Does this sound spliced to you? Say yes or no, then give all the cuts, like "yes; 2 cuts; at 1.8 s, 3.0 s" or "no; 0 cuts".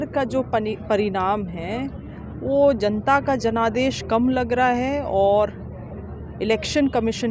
no; 0 cuts